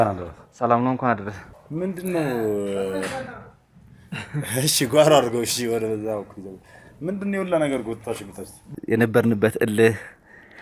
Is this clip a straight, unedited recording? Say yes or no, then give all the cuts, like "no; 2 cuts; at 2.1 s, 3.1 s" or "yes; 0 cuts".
no; 2 cuts; at 1.5 s, 8.6 s